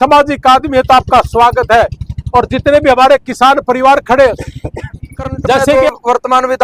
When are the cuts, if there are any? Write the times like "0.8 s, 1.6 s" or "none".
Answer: 5.7 s